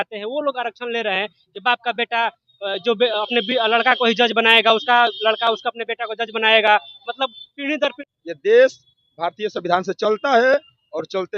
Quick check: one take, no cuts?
no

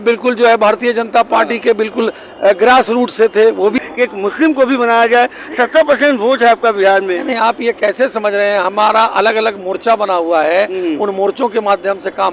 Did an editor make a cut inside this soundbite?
yes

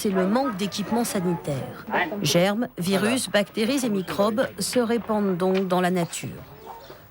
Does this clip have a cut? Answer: yes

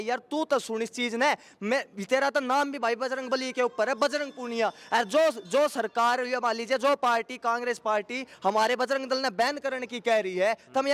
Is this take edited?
no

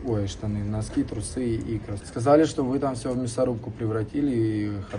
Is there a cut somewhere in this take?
yes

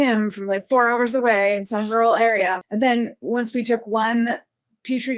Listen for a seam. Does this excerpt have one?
yes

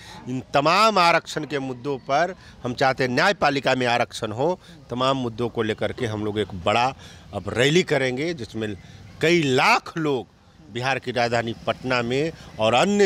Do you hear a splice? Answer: no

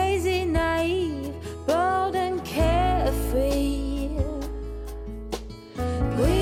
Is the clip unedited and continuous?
yes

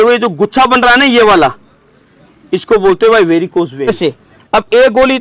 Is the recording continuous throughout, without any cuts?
no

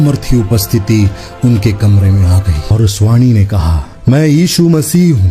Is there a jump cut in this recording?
yes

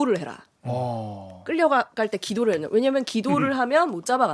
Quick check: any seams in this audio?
no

